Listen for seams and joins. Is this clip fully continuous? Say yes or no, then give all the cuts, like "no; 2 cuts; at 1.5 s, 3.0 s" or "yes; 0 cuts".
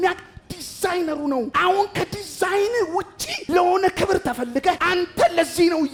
yes; 0 cuts